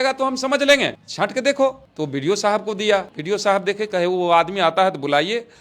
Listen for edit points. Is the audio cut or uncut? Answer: cut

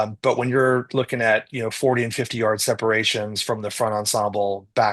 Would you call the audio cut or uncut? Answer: uncut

